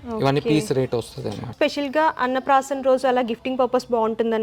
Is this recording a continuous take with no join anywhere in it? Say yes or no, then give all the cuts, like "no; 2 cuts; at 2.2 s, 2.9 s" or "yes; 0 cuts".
no; 1 cut; at 1.5 s